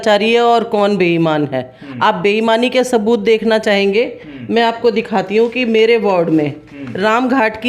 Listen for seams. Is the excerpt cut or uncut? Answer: uncut